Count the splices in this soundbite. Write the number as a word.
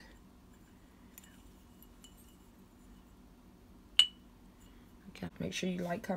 one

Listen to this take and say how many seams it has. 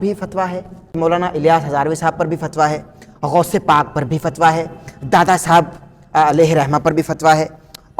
one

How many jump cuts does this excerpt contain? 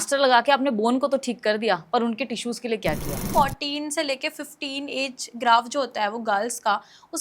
one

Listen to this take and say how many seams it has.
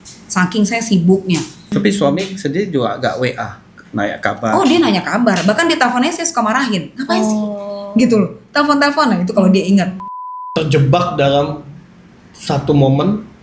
two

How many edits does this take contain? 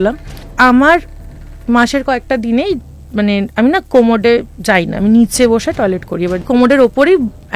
one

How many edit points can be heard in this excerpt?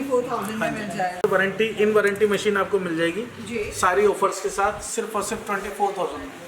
one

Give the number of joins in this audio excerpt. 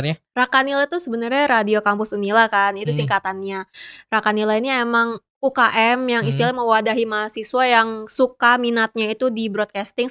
zero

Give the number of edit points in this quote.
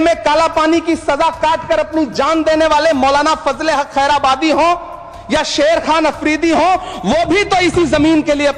zero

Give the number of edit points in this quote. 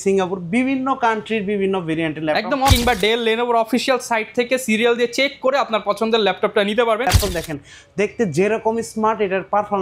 two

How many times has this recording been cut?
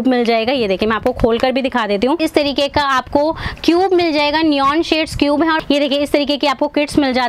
two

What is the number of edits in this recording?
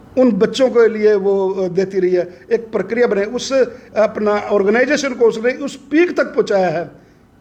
zero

